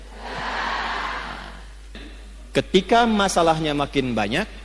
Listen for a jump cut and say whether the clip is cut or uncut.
cut